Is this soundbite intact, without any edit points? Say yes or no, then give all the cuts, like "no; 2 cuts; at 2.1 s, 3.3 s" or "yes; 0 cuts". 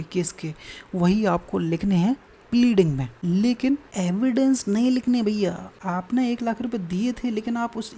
no; 3 cuts; at 3.1 s, 3.9 s, 5.7 s